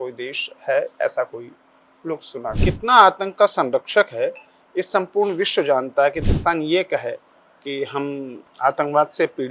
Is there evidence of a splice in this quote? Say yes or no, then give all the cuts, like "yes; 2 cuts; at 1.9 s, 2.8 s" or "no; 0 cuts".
yes; 2 cuts; at 2.5 s, 6.2 s